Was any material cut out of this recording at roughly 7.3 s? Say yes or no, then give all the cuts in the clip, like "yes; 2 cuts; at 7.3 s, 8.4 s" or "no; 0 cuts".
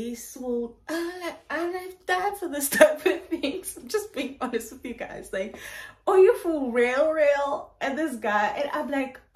no; 0 cuts